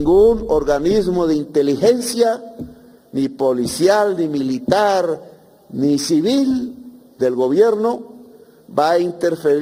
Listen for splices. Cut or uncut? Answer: uncut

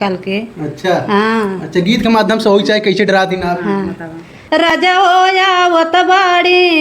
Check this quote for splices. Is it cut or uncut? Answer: cut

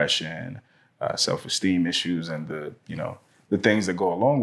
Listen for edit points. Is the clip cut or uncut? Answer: uncut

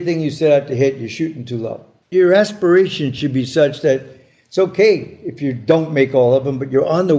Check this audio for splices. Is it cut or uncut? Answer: cut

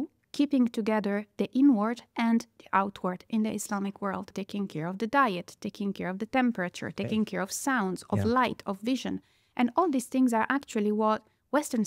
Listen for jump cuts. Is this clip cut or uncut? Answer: cut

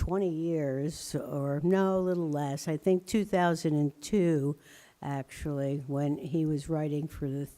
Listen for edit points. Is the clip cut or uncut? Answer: cut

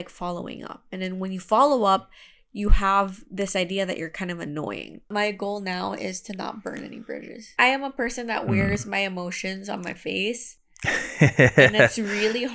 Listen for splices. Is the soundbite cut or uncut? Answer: cut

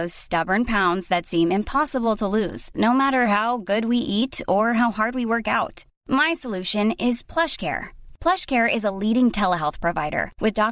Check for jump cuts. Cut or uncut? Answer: uncut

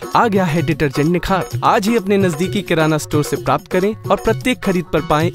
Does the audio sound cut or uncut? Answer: uncut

